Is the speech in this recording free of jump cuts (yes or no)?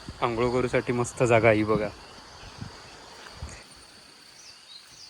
no